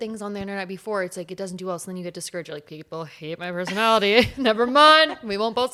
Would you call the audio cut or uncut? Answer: uncut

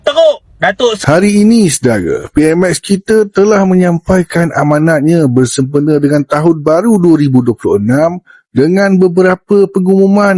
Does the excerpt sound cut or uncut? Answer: cut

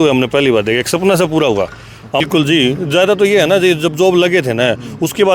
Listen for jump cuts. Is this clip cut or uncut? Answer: cut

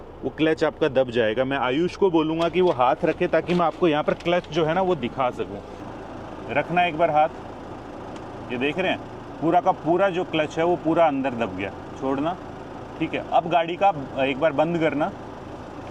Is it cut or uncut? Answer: uncut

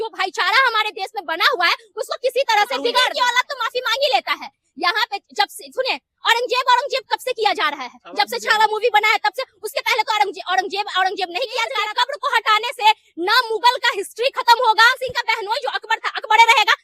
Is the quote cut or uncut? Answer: cut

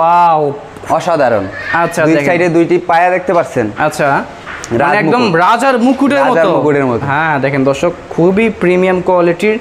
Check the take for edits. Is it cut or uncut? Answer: uncut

